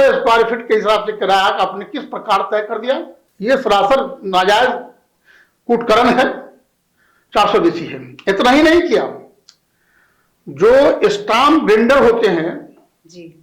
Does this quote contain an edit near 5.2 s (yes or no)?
no